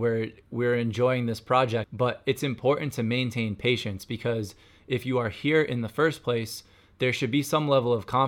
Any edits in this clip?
yes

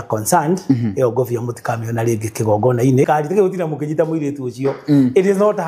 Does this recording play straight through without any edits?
no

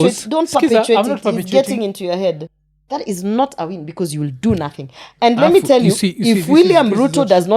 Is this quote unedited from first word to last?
no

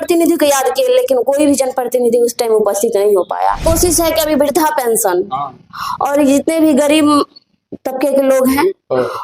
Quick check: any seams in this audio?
yes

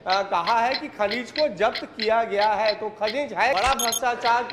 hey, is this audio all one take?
no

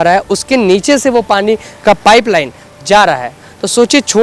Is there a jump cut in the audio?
no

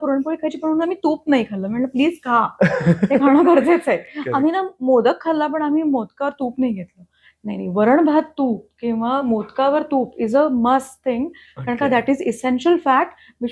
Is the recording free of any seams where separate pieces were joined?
yes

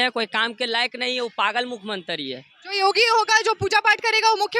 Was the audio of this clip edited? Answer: no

